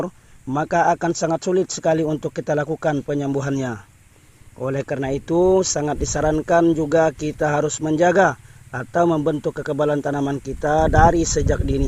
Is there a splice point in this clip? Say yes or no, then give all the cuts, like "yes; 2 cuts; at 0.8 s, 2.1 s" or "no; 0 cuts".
no; 0 cuts